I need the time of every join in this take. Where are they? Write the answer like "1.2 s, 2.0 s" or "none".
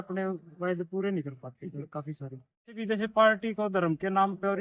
2.8 s